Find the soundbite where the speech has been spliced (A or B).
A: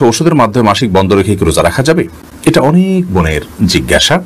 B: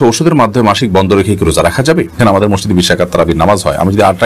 B